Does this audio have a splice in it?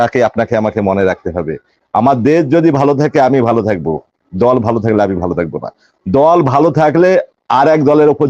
no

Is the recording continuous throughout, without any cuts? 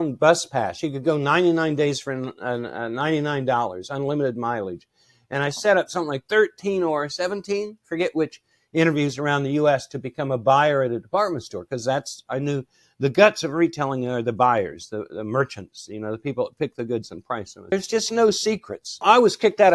no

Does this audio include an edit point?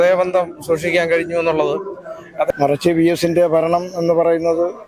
yes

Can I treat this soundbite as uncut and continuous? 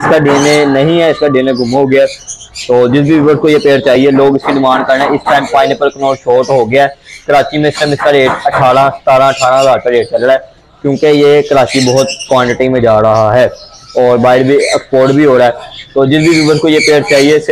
yes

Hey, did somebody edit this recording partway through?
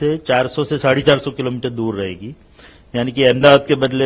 no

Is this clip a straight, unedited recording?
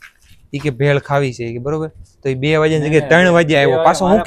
yes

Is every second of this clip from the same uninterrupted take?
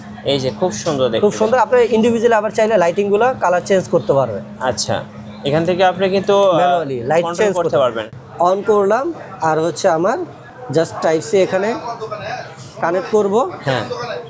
no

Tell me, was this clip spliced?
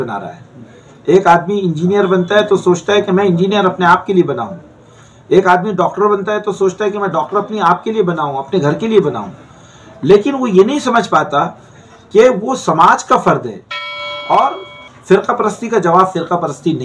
yes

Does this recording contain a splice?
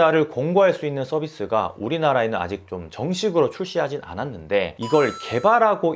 no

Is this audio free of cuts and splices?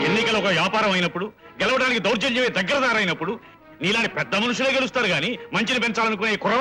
yes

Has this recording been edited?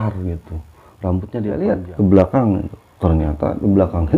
yes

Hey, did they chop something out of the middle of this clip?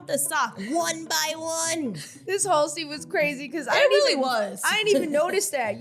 yes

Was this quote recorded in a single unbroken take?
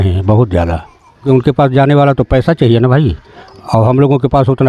no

